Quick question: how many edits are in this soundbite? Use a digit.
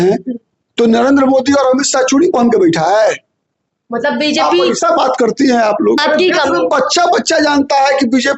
1